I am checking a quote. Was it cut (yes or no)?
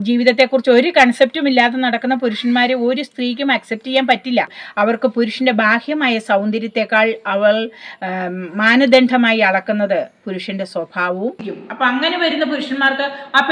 yes